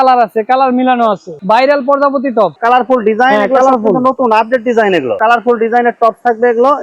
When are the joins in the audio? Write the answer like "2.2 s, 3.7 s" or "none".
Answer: 5.1 s